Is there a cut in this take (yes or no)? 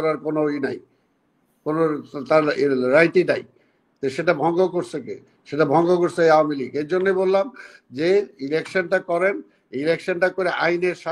no